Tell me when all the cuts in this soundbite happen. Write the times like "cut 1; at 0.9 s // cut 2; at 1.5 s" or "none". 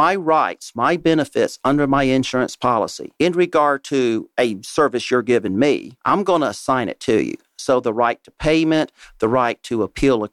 cut 1; at 3.0 s // cut 2; at 4.3 s // cut 3; at 5.9 s